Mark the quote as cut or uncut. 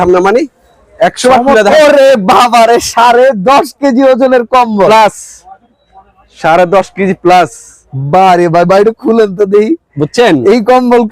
cut